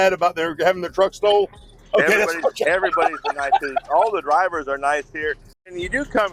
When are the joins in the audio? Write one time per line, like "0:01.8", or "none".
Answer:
none

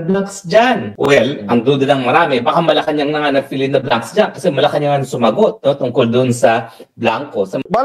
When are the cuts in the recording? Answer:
none

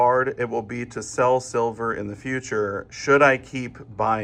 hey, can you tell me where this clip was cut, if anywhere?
none

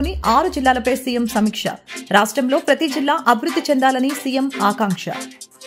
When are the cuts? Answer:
none

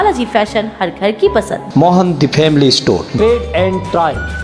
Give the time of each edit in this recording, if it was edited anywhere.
none

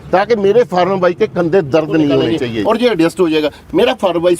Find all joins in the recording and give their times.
0:02.4

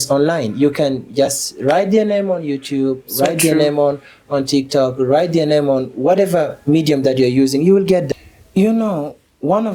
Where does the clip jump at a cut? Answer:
0:08.1

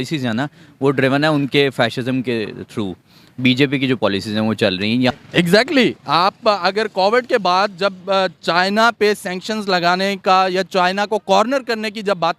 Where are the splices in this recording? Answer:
0:05.1

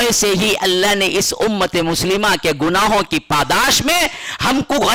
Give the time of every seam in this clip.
none

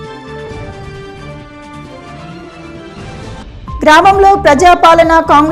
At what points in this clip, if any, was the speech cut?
none

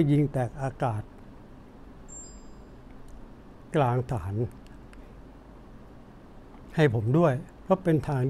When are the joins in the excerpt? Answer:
none

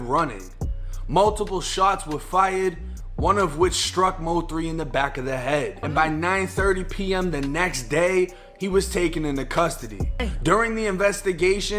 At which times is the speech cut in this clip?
0:05.8
0:10.2

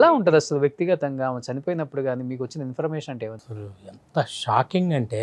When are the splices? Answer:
0:03.4

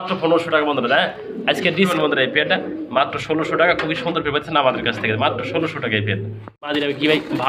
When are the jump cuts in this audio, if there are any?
0:01.9
0:06.7

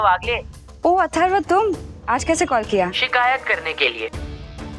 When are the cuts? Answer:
0:01.9
0:03.0

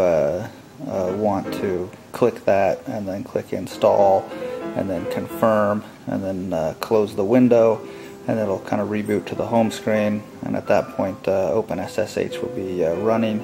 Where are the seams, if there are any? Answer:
none

